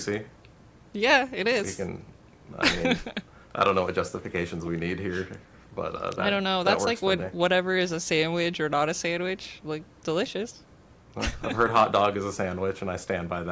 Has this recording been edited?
no; 0 cuts

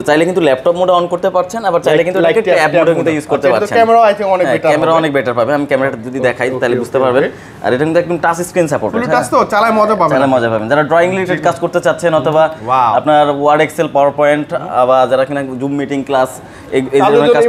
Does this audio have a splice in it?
no; 0 cuts

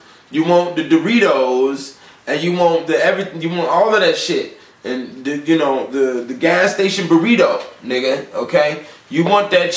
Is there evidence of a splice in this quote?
no; 0 cuts

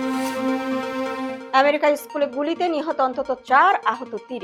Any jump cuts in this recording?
no; 0 cuts

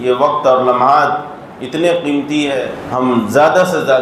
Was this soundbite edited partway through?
yes; 1 cut; at 2.8 s

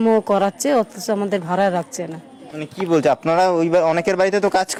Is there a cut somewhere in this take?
no; 0 cuts

